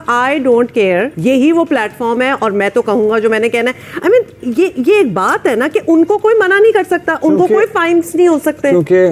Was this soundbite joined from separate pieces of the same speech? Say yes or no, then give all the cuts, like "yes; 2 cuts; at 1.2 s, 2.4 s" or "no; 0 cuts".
yes; 1 cut; at 1.1 s